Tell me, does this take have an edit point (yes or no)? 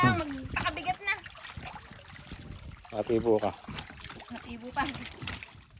no